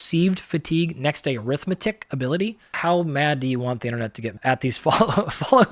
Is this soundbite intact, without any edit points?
no; 2 cuts; at 2.8 s, 4.4 s

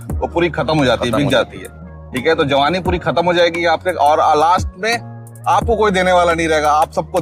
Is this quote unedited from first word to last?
yes; 0 cuts

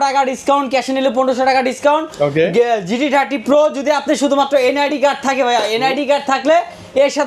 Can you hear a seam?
no; 0 cuts

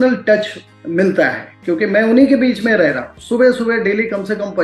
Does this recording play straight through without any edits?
no; 1 cut; at 3.2 s

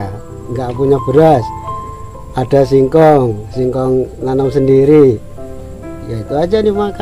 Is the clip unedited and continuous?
yes; 0 cuts

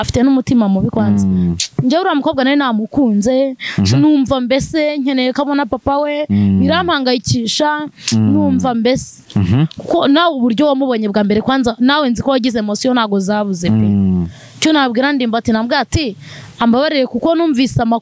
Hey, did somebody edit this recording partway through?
no; 0 cuts

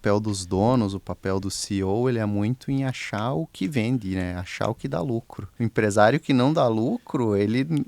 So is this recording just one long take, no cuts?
no; 2 cuts; at 1.4 s, 5.4 s

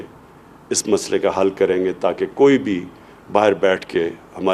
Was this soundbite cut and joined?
no; 0 cuts

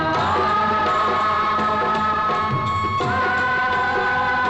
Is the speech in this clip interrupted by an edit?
no; 0 cuts

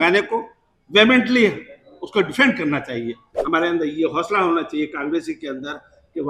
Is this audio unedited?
no; 1 cut; at 3.3 s

